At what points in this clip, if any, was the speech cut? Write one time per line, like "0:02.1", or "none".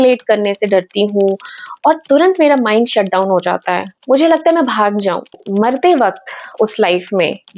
0:05.4